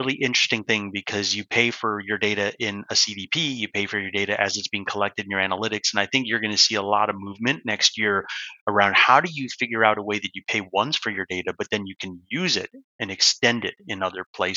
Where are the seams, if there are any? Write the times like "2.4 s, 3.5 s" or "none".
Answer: none